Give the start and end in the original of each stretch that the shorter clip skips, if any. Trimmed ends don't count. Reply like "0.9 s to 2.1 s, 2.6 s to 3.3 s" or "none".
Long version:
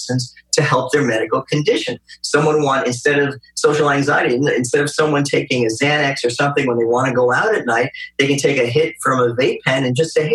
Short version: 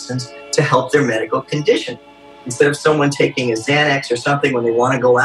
2.4 s to 4.5 s